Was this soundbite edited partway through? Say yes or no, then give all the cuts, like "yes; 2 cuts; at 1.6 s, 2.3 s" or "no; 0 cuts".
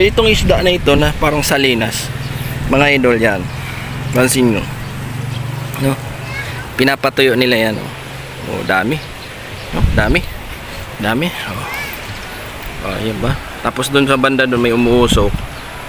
no; 0 cuts